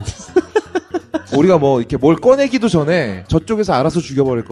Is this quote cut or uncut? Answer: uncut